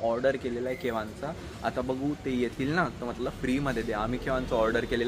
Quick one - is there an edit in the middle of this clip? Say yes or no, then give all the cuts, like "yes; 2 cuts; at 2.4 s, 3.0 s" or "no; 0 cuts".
no; 0 cuts